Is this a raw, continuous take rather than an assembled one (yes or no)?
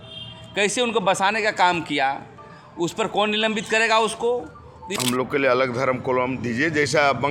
no